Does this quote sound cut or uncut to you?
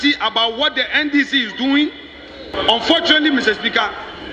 cut